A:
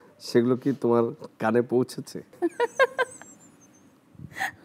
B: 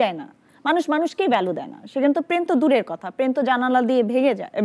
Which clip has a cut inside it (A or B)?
A